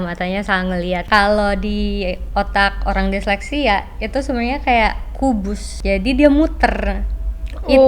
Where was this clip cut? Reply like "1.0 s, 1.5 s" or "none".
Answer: 1.0 s, 5.7 s